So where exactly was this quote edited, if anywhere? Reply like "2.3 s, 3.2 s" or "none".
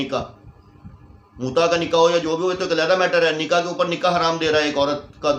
none